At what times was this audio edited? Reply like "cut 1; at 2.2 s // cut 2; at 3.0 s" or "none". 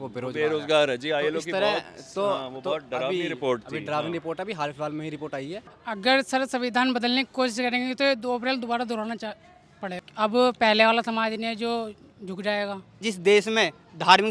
cut 1; at 5.7 s // cut 2; at 10.0 s // cut 3; at 13.0 s